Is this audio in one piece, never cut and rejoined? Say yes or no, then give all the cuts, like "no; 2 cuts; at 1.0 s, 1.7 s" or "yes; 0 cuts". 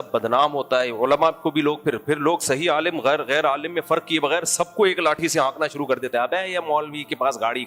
yes; 0 cuts